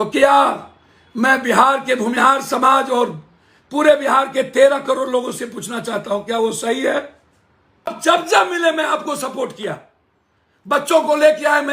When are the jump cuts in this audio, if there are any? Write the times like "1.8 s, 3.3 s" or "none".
7.9 s